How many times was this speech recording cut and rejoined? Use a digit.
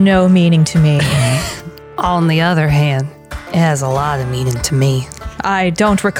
1